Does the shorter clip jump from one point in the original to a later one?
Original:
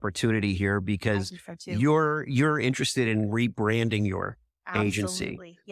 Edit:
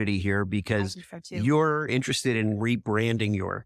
yes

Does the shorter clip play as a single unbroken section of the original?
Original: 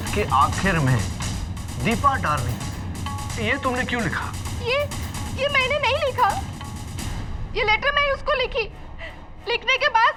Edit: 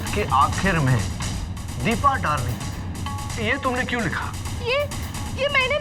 yes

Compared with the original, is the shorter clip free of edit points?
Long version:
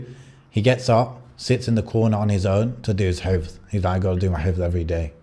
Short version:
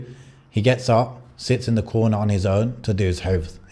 yes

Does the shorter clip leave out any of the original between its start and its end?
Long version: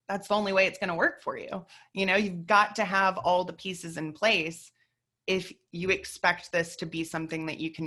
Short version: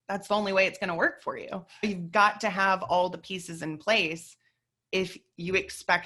yes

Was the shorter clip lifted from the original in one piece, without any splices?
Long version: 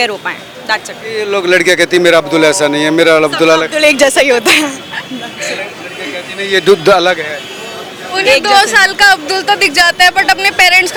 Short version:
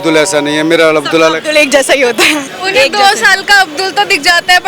no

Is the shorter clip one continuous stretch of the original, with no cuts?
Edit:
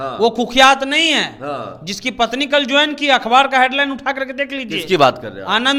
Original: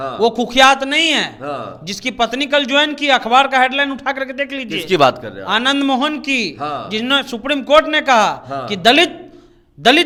yes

